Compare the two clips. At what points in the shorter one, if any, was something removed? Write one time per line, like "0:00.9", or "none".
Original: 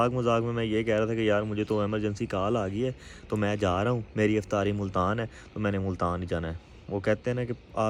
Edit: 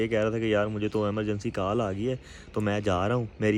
none